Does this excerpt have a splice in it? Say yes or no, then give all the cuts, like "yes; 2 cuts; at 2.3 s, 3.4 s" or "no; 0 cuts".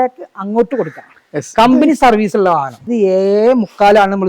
yes; 1 cut; at 2.8 s